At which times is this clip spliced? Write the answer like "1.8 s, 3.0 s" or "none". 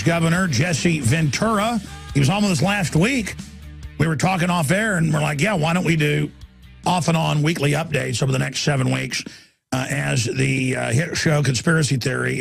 5.0 s